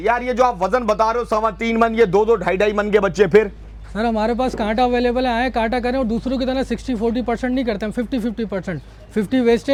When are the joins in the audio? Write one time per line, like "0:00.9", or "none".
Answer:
none